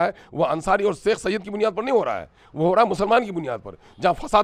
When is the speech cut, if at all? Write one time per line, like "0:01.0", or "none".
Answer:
none